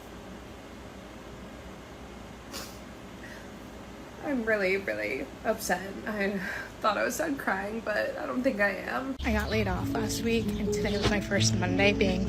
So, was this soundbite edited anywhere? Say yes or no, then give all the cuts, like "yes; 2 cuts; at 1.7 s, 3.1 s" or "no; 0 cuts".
yes; 1 cut; at 9.2 s